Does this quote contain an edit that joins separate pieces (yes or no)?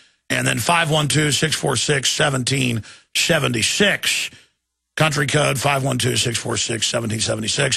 yes